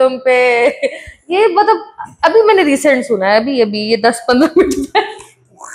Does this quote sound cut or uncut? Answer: uncut